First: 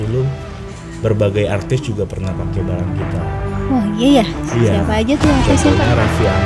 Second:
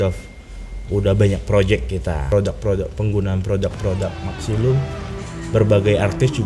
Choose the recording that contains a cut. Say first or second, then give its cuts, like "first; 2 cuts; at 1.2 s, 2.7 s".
second; 1 cut; at 2.2 s